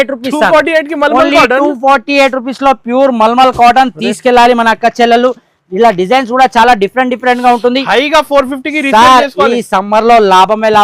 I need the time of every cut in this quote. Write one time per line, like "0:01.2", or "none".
none